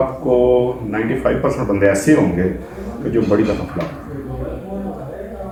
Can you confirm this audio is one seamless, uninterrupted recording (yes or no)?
yes